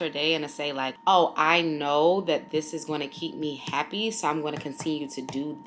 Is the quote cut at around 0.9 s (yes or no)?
yes